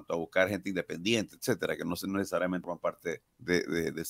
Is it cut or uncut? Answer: cut